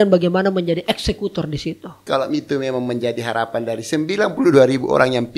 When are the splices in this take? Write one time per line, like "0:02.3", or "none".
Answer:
0:02.0